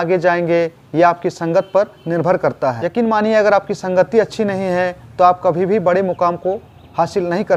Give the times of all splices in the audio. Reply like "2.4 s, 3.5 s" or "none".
none